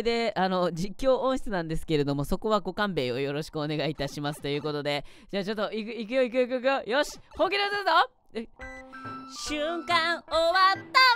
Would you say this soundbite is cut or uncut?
uncut